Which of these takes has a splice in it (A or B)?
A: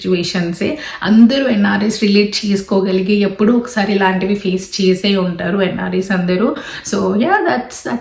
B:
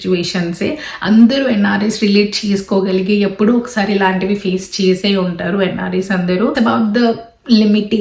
B